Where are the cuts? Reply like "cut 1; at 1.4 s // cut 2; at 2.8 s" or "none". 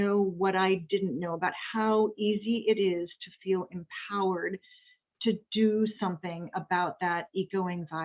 none